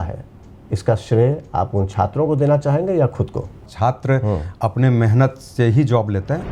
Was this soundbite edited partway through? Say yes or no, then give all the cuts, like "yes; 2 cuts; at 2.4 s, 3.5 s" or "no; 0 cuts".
yes; 1 cut; at 3.7 s